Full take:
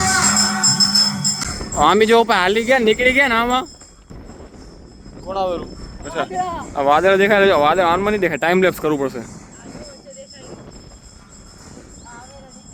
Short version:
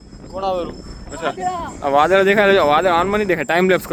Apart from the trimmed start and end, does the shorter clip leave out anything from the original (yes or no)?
no